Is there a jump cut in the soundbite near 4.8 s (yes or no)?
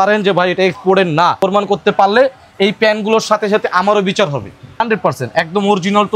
yes